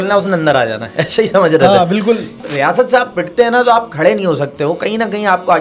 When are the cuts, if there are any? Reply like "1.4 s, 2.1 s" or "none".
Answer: 2.4 s